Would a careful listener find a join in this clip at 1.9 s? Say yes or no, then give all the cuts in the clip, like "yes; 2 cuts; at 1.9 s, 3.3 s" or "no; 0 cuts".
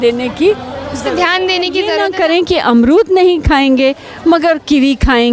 yes; 1 cut; at 1.9 s